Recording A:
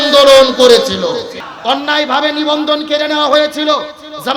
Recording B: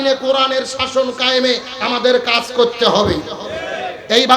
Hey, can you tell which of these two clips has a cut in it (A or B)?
A